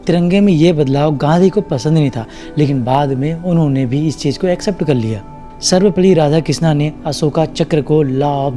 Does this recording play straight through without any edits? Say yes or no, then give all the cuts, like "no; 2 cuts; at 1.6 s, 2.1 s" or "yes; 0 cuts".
yes; 0 cuts